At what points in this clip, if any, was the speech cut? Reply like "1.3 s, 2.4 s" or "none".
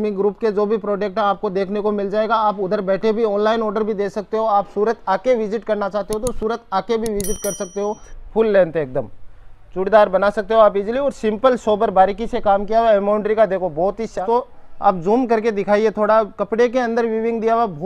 8.1 s, 14.2 s